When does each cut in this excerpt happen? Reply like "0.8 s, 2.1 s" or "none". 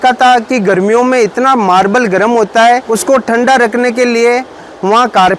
2.9 s